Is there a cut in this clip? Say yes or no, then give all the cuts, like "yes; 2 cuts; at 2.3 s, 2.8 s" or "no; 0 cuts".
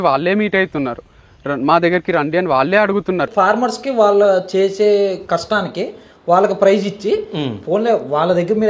yes; 1 cut; at 3.3 s